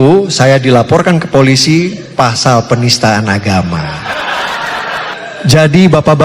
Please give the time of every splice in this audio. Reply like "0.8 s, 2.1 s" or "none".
5.1 s

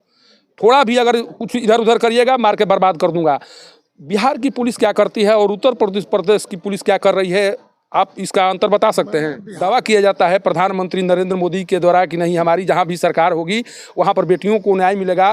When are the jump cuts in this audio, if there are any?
9.4 s

